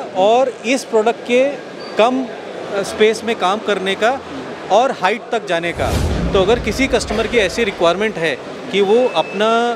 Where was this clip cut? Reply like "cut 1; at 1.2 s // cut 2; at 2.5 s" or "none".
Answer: cut 1; at 6.1 s